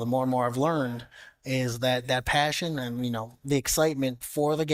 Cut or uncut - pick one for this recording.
uncut